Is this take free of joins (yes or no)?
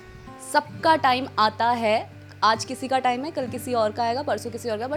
yes